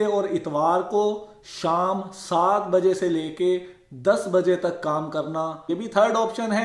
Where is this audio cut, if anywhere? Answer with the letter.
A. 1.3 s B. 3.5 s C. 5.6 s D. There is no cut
C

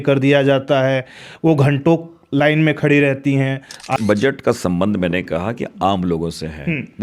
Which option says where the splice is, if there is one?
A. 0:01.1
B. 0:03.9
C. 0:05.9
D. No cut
B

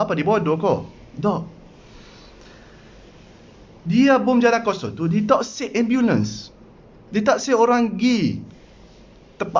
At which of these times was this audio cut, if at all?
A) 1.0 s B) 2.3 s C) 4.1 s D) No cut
D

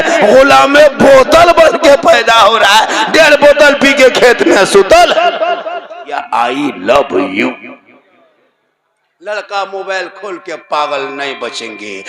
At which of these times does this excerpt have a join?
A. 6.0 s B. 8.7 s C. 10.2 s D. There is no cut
A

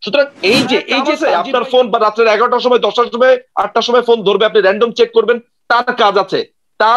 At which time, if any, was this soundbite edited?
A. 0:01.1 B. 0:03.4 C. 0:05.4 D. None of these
A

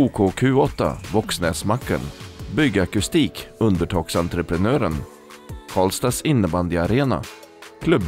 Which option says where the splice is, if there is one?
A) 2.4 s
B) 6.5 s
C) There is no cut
C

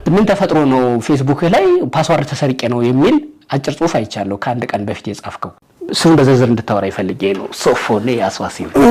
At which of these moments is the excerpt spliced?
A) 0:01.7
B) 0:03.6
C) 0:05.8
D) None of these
D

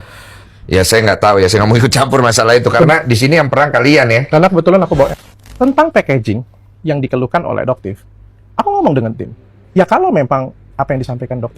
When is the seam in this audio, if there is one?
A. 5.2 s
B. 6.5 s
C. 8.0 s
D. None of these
A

